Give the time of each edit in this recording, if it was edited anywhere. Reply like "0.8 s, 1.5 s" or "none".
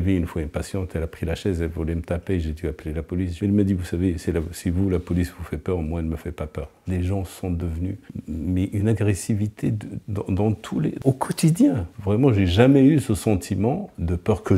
6.7 s, 8.1 s, 12.0 s